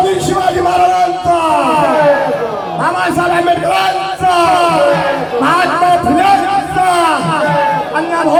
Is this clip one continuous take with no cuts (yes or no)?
yes